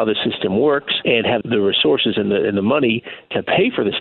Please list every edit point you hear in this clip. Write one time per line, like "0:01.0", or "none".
none